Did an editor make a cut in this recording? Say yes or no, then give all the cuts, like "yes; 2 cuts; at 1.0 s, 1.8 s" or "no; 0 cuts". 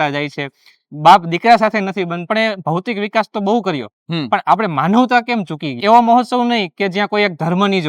yes; 2 cuts; at 2.3 s, 5.8 s